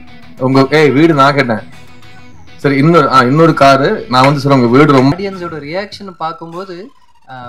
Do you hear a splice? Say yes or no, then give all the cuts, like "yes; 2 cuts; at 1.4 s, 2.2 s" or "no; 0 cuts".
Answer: yes; 1 cut; at 5.1 s